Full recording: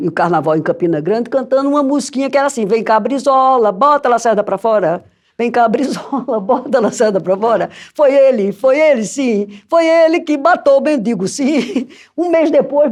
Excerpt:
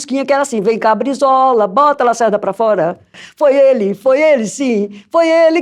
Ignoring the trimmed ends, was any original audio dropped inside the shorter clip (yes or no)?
yes